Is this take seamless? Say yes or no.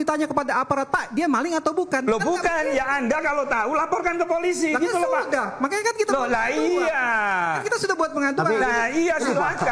yes